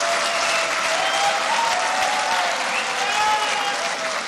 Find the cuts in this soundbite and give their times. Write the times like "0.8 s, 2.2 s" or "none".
none